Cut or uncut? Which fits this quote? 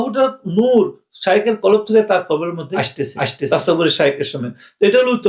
uncut